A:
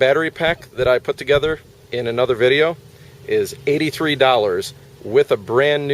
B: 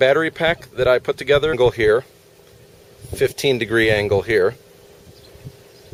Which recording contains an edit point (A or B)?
A